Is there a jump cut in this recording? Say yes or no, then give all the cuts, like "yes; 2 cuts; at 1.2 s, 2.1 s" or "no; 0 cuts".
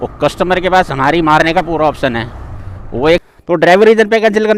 yes; 1 cut; at 3.2 s